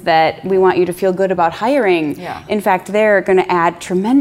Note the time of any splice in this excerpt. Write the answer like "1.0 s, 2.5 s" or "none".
none

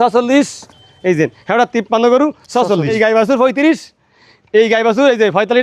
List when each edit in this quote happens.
2.9 s

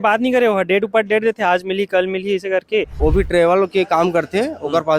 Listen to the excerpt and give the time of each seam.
2.9 s

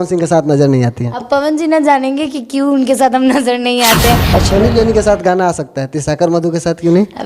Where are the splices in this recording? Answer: 4.3 s

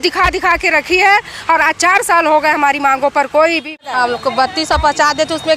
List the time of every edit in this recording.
3.9 s

